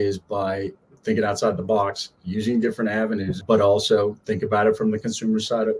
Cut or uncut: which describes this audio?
cut